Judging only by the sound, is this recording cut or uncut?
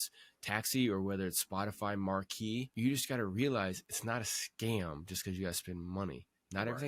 cut